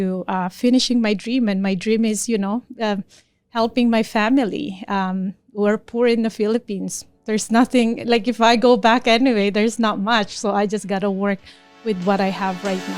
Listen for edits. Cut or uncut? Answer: uncut